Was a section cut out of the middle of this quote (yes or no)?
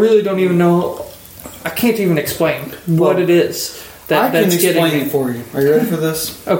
no